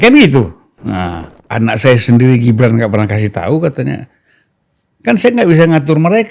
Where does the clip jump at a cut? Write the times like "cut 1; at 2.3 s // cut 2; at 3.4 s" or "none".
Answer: cut 1; at 1.4 s